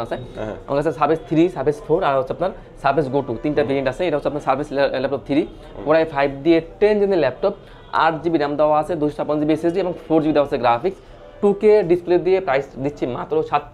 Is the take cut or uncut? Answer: uncut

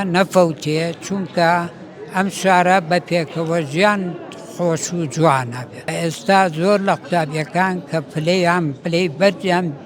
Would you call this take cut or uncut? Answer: cut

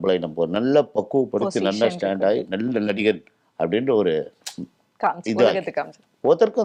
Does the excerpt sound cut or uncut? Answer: uncut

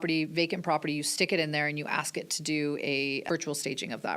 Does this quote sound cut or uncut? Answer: cut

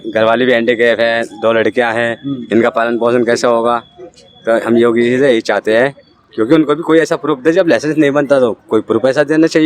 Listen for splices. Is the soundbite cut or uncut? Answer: uncut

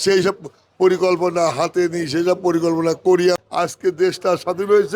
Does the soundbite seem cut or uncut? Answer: cut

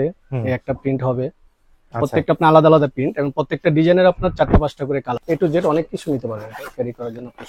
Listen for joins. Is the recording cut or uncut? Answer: cut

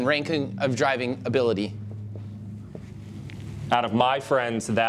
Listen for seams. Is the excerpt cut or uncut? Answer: uncut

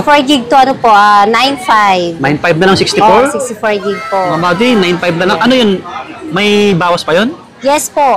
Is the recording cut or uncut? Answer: uncut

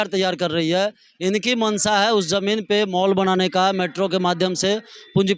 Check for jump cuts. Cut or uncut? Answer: uncut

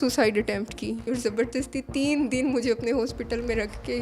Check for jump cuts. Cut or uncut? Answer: cut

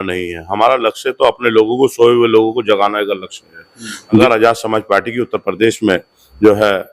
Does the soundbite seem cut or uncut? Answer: cut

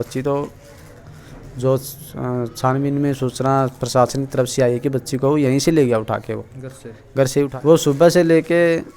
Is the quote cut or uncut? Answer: cut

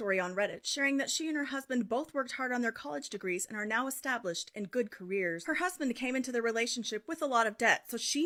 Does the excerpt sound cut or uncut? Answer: uncut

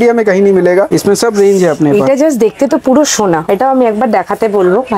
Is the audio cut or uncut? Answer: cut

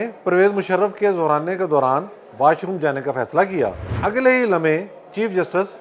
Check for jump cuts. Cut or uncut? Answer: cut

